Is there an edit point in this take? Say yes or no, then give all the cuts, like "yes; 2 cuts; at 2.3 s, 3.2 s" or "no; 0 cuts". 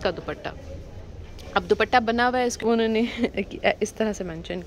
yes; 1 cut; at 2.6 s